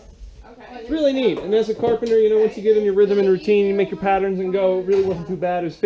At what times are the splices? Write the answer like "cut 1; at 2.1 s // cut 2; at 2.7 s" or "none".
none

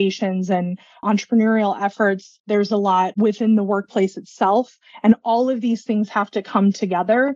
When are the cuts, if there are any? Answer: cut 1; at 1.0 s // cut 2; at 2.3 s // cut 3; at 3.1 s

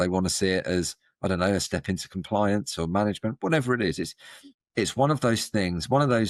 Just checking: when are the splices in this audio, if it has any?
cut 1; at 4.3 s

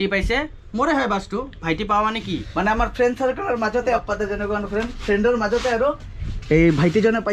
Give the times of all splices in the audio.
cut 1; at 2.5 s // cut 2; at 4.0 s

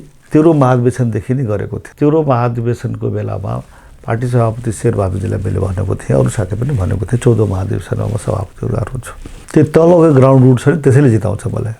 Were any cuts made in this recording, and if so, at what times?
cut 1; at 1.8 s // cut 2; at 9.3 s

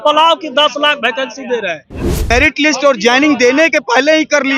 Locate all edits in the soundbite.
cut 1; at 2.3 s

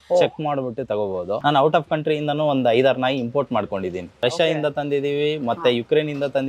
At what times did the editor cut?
cut 1; at 1.4 s // cut 2; at 4.1 s

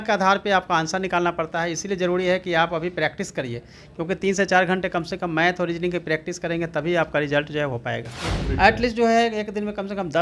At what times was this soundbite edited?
cut 1; at 8.2 s

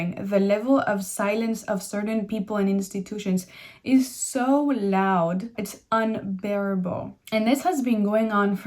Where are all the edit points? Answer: cut 1; at 5.5 s // cut 2; at 7.1 s

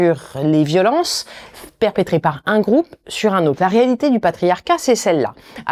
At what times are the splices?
none

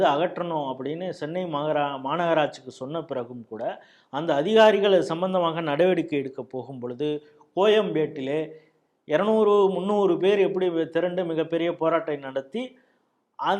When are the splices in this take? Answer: none

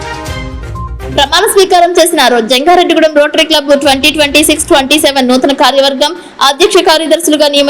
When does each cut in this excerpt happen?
cut 1; at 1.0 s

